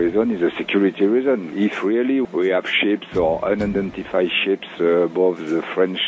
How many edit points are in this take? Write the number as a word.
one